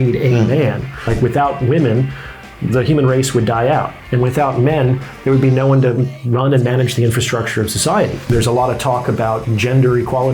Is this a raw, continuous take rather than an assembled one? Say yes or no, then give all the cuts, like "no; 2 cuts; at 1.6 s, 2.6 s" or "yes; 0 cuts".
no; 2 cuts; at 1.1 s, 8.2 s